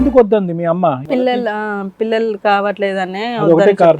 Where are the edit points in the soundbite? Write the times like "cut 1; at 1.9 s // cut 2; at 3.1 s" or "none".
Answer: cut 1; at 1.2 s